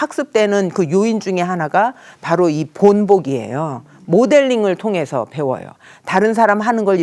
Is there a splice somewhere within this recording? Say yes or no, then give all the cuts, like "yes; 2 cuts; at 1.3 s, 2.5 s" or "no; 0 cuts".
no; 0 cuts